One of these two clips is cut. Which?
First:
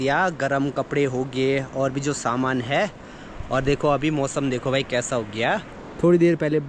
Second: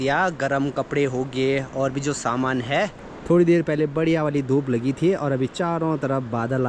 second; 1 cut; at 3.1 s

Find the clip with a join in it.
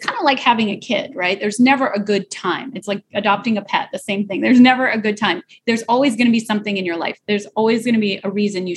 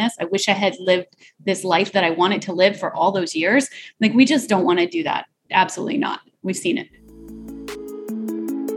second; 2 cuts; at 5.3 s, 7.0 s

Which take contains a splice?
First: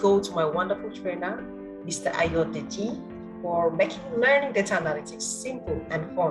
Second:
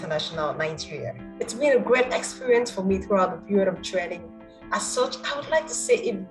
second; 1 cut; at 1.2 s

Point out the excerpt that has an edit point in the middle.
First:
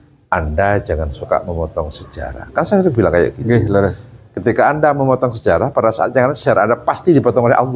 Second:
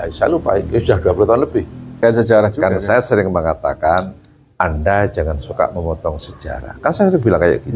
second; 1 cut; at 1.8 s

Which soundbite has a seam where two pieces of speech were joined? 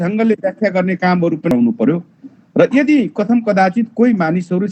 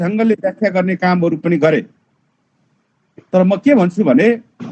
first; 1 cut; at 1.5 s

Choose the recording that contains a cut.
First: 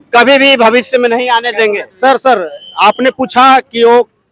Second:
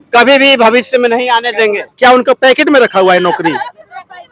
second; 1 cut; at 1.9 s

